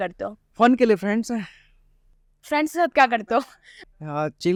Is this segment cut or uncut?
uncut